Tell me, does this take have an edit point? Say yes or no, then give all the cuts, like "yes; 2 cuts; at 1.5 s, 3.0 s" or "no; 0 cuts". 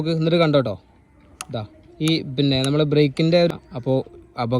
yes; 1 cut; at 3.5 s